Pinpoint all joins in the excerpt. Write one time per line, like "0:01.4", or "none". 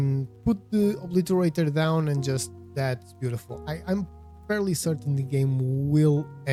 none